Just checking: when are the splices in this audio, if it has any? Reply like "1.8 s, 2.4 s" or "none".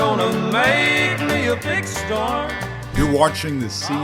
3.0 s